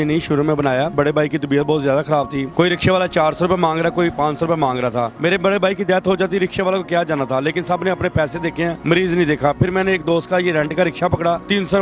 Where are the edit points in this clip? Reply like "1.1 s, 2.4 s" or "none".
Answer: 0.9 s, 2.5 s, 5.1 s, 9.6 s